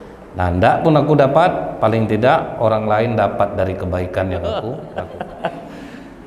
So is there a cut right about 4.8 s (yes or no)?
yes